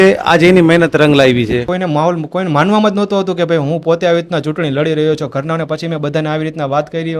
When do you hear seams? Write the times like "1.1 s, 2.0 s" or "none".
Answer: 1.7 s